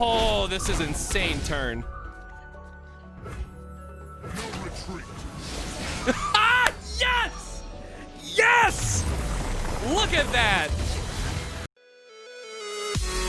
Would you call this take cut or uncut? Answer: cut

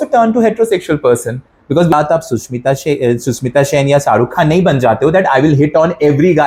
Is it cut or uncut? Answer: cut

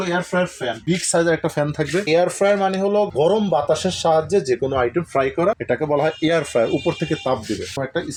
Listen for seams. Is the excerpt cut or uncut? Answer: uncut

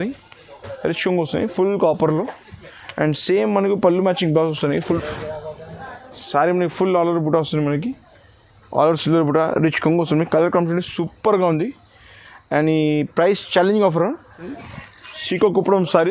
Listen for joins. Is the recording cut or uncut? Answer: cut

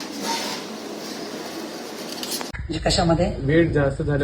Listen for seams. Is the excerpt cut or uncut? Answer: cut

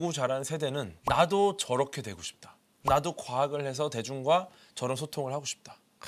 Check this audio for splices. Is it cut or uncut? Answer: uncut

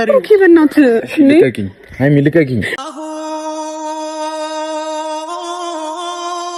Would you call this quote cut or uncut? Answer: uncut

